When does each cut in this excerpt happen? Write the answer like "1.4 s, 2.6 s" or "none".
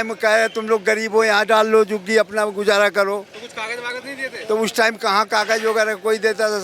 none